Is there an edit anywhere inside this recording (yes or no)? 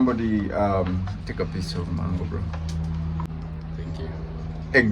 yes